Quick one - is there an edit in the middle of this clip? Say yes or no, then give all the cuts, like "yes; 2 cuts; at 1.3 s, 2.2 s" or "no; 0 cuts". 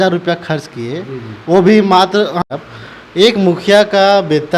yes; 1 cut; at 2.5 s